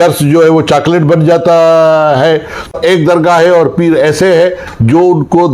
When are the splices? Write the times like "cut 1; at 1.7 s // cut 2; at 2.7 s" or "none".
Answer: cut 1; at 2.7 s